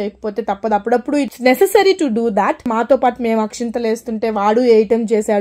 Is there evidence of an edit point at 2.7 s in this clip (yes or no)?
yes